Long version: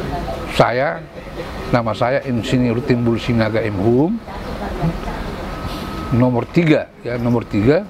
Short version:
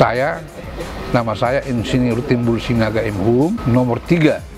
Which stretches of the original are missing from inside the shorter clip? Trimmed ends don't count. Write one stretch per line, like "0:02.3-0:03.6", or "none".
0:04.2-0:06.1